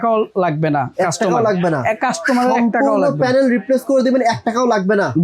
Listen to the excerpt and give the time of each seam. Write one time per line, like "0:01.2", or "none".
none